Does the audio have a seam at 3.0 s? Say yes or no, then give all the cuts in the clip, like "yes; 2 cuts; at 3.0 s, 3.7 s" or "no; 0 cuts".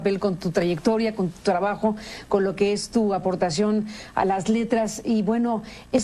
no; 0 cuts